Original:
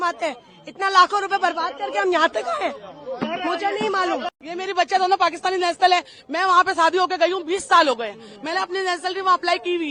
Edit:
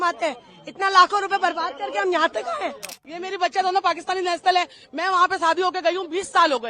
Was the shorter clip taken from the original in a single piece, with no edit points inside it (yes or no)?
no